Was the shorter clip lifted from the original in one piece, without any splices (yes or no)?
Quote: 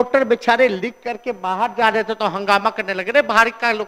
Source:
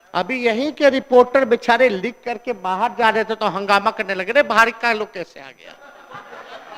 yes